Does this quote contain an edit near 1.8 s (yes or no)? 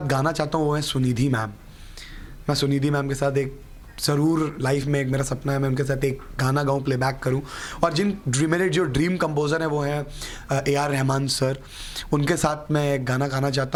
no